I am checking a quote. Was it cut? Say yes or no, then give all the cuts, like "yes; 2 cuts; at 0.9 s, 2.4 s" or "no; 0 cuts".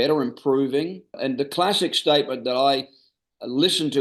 yes; 1 cut; at 1.1 s